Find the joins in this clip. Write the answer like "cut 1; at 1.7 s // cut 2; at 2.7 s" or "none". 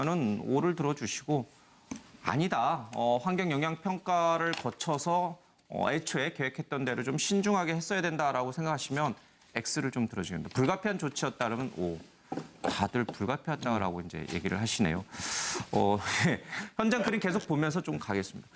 none